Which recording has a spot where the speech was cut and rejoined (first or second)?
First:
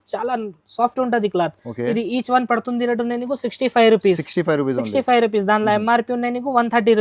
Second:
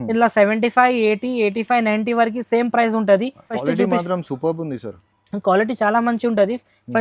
second